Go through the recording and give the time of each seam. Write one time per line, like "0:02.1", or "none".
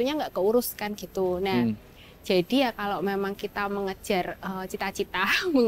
none